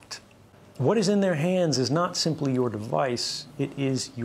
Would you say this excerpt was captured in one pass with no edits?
yes; 0 cuts

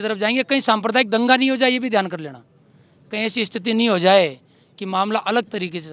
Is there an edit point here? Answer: no; 0 cuts

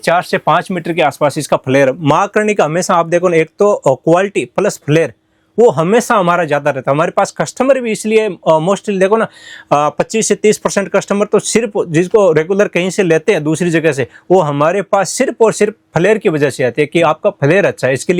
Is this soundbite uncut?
yes; 0 cuts

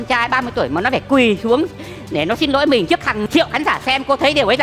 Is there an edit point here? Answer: no; 0 cuts

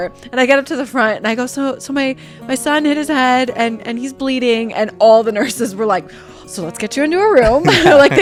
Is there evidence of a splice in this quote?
no; 0 cuts

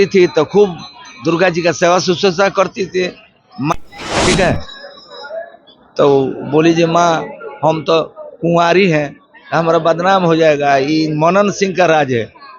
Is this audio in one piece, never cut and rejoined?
no; 1 cut; at 3.7 s

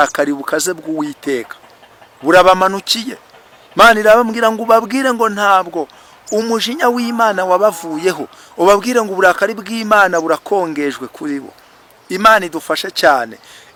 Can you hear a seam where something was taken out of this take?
no; 0 cuts

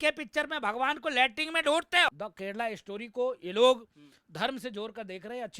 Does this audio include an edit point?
no; 0 cuts

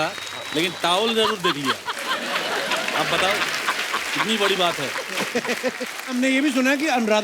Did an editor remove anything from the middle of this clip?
yes; 1 cut; at 6.1 s

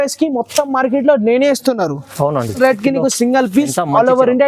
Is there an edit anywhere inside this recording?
yes; 1 cut; at 2.6 s

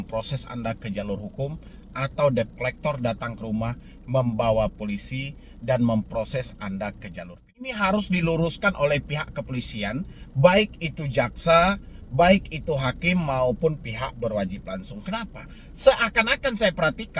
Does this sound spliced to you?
yes; 1 cut; at 7.7 s

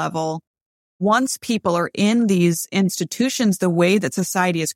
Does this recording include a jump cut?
yes; 1 cut; at 1.0 s

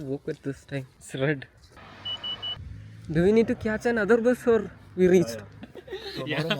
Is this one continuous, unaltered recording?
no; 3 cuts; at 1.0 s, 1.6 s, 2.6 s

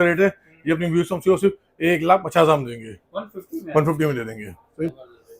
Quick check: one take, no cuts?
yes; 0 cuts

